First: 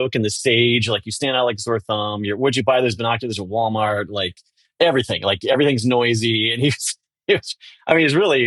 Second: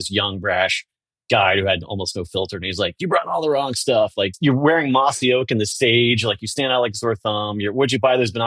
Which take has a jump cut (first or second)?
second